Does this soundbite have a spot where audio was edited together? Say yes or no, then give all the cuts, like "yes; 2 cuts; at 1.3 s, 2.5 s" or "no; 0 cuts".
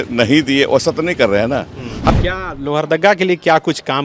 yes; 1 cut; at 2.1 s